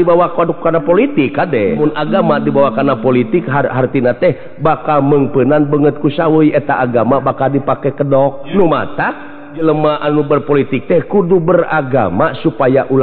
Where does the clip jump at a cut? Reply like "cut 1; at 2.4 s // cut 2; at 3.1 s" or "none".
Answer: cut 1; at 1.8 s // cut 2; at 8.4 s // cut 3; at 9.6 s